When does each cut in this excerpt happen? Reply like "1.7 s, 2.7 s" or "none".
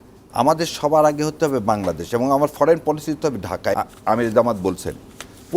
3.8 s